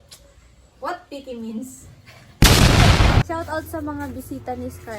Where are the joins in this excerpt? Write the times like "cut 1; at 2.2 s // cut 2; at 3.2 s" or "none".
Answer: cut 1; at 2.2 s // cut 2; at 3.2 s